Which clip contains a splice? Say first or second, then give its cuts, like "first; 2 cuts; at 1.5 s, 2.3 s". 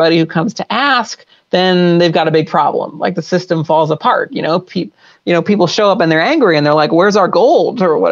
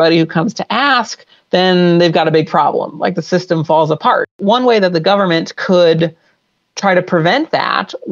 second; 1 cut; at 4.4 s